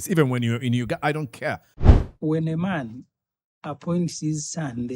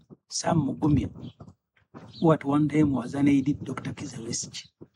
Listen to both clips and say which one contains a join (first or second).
first